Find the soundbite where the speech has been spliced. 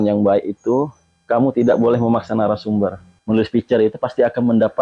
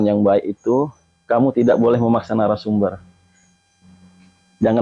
first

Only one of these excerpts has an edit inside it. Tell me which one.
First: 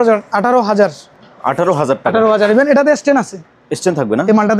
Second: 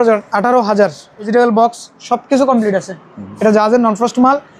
second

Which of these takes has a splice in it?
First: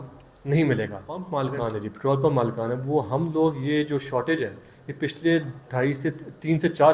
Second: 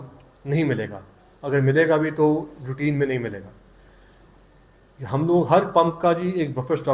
first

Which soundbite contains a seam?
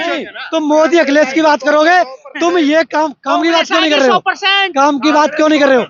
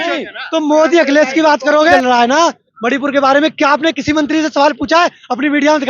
second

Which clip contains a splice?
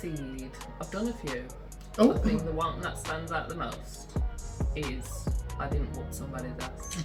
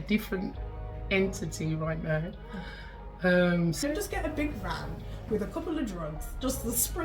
second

